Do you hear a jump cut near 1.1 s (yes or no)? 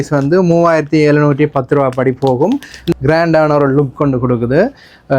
no